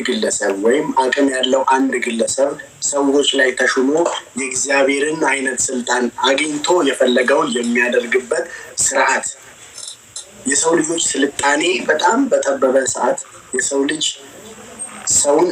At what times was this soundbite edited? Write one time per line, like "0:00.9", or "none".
none